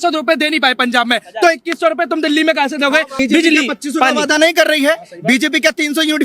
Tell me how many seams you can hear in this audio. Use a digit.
1